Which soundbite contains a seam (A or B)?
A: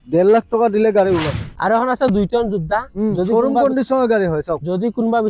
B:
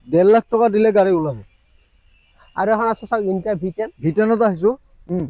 A